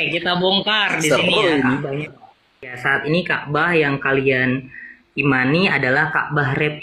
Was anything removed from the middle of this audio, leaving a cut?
yes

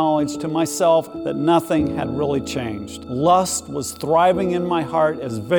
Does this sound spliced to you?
yes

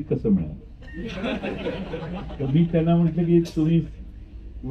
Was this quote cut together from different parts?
no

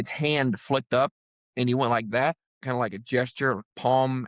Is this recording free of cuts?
yes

